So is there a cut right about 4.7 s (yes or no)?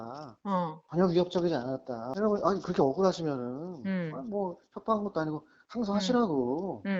no